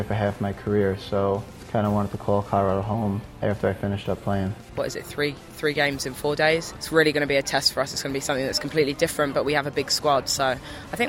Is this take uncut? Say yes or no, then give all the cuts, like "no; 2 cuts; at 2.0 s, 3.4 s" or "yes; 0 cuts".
no; 4 cuts; at 1.6 s, 3.3 s, 4.7 s, 6.8 s